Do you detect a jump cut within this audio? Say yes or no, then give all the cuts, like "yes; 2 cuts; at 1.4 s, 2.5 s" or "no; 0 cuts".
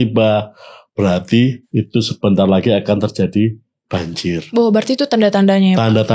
yes; 1 cut; at 1.6 s